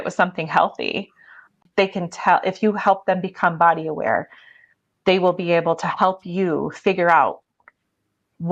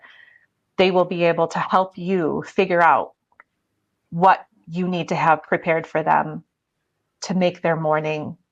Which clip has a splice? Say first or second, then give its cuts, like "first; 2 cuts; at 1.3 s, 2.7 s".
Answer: first; 1 cut; at 1.5 s